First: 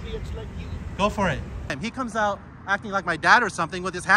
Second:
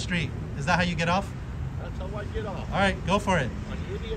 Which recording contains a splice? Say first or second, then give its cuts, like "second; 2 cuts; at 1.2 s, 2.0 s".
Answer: first; 1 cut; at 1.8 s